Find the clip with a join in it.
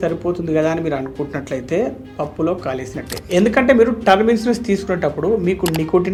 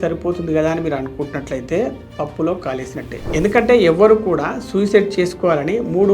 second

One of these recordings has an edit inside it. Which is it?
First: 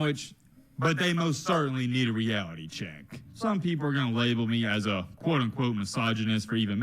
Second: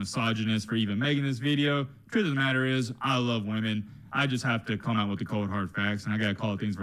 first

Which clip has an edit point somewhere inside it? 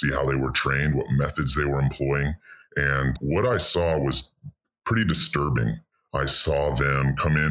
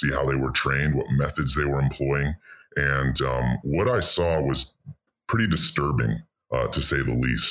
first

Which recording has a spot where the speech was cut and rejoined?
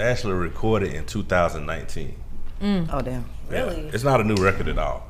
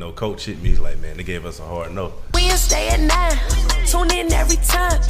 second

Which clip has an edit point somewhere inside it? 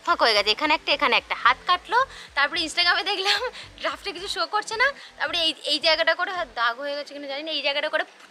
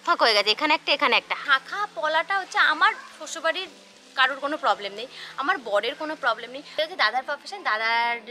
second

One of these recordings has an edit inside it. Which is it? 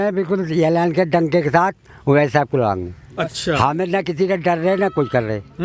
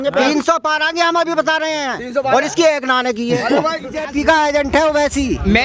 second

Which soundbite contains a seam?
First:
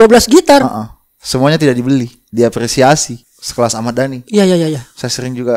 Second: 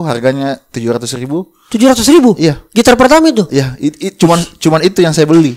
first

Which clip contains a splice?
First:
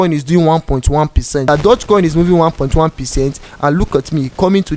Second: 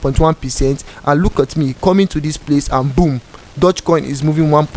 first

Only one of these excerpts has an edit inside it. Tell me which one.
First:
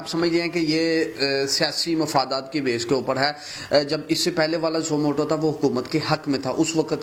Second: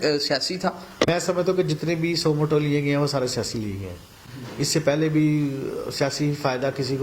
second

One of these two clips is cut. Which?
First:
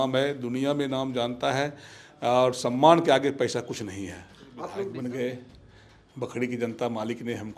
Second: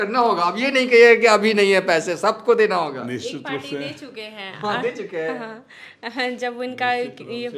first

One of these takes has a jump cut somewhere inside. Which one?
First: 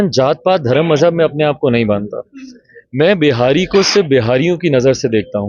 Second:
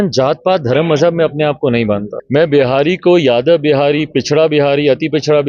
second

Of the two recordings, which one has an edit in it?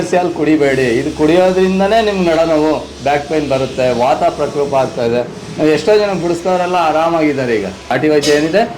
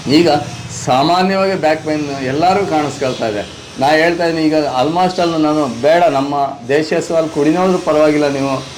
first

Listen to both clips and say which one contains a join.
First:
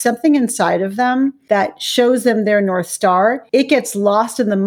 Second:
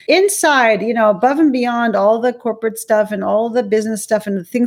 first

